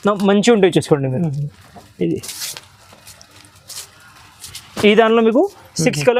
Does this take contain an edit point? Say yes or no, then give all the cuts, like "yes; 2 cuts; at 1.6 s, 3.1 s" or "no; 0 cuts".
no; 0 cuts